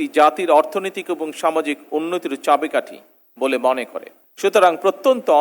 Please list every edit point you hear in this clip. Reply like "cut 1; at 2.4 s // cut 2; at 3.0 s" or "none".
cut 1; at 4.2 s